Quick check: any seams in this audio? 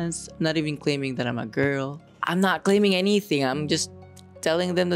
no; 0 cuts

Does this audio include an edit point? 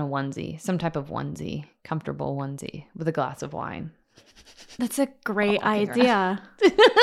no; 0 cuts

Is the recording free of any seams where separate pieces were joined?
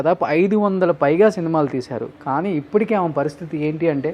yes; 0 cuts

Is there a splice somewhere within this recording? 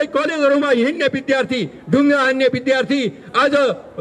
no; 0 cuts

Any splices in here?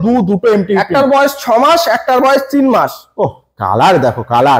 no; 0 cuts

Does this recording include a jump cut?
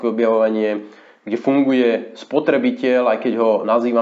no; 0 cuts

